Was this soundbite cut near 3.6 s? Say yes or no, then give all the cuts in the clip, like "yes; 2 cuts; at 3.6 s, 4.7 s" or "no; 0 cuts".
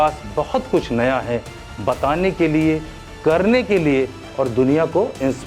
no; 0 cuts